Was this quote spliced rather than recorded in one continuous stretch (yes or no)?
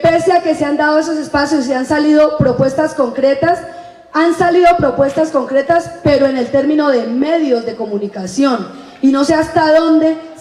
yes